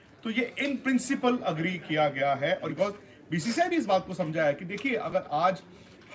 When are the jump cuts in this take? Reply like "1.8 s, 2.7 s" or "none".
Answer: 2.7 s